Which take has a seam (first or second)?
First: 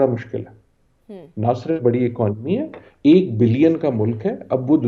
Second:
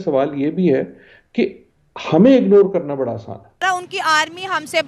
second